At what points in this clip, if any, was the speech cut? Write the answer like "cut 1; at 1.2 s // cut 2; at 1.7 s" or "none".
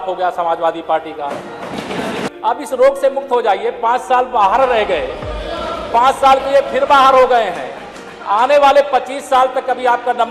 cut 1; at 2.3 s